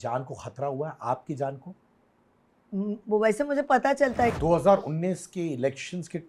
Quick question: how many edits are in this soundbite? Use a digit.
1